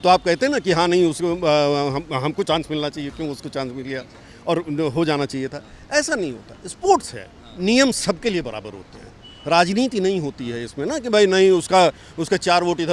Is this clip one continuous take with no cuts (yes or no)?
yes